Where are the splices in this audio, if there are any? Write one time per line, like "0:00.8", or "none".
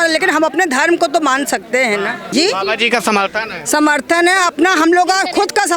0:02.2

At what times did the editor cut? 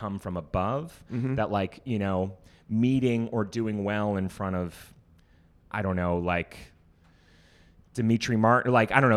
none

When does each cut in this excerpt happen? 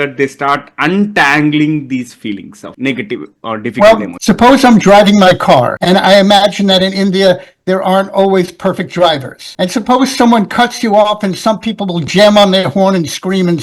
0:04.1

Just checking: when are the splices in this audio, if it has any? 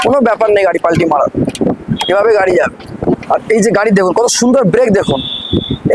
none

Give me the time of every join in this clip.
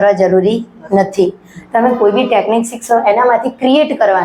none

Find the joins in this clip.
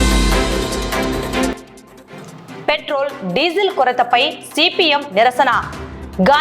0:01.5

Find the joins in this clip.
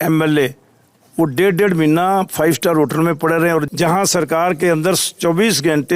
0:03.7

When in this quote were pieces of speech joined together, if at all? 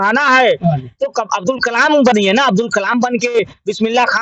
none

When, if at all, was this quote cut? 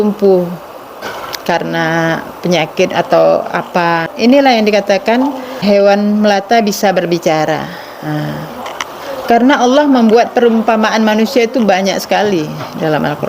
0:01.0
0:04.1
0:05.6
0:08.6

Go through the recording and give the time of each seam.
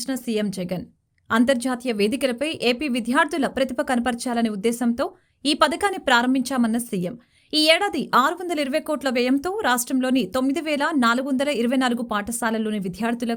none

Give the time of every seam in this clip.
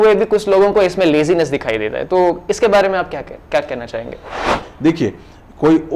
0:04.7

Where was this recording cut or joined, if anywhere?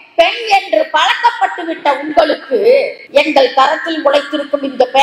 0:03.0

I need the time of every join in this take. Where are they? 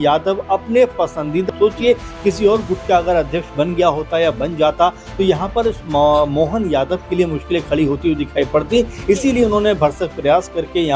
0:01.5

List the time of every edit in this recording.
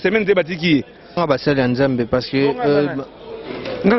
0:01.2

